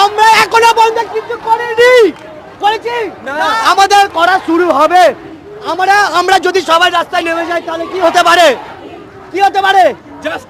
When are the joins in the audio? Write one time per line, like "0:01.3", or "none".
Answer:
none